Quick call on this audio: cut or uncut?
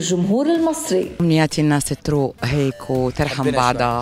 uncut